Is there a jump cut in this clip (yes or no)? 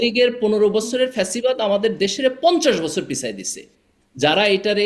no